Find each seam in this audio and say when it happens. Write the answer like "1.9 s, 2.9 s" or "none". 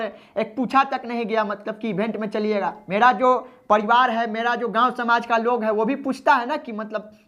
none